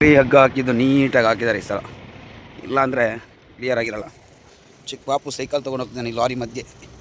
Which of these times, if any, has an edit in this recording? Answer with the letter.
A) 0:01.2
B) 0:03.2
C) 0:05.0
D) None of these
D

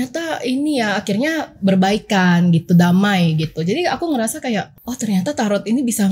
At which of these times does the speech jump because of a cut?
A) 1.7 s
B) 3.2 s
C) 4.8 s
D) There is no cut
C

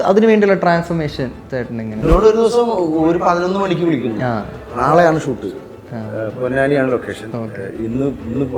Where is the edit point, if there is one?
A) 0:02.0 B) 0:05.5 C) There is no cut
A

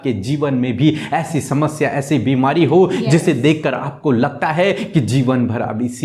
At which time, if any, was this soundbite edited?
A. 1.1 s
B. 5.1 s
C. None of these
C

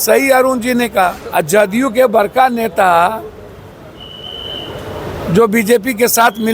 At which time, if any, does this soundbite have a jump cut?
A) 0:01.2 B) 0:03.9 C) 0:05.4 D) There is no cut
A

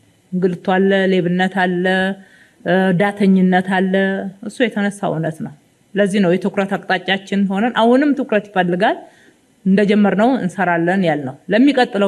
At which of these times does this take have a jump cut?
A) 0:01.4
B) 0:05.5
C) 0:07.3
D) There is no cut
D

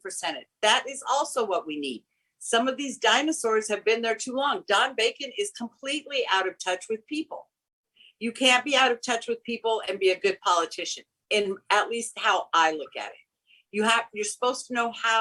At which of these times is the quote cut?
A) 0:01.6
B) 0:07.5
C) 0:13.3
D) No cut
D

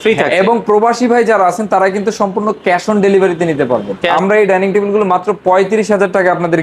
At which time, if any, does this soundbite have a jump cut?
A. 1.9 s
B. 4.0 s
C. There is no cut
B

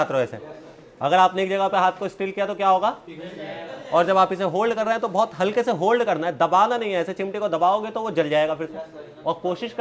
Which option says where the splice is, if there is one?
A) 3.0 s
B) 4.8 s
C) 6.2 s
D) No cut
D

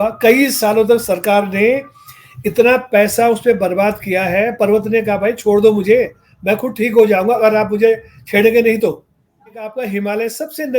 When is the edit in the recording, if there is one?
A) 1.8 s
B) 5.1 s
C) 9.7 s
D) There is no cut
C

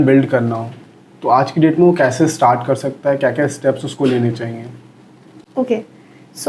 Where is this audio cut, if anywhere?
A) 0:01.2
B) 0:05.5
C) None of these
C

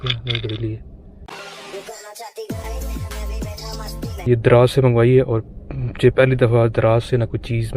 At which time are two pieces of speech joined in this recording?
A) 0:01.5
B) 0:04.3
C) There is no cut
B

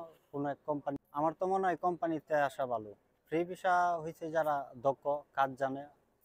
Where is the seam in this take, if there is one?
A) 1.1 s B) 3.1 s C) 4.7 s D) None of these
A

